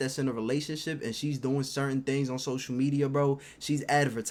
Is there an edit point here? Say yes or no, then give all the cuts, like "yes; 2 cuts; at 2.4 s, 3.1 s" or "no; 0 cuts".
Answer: no; 0 cuts